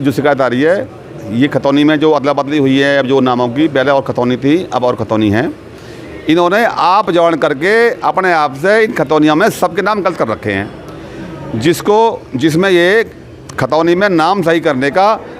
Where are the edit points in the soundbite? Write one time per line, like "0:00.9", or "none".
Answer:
none